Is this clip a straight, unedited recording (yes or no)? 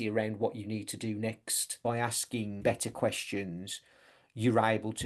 no